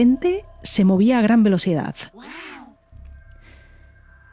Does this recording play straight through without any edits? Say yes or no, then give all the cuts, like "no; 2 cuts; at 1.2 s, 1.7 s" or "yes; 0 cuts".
yes; 0 cuts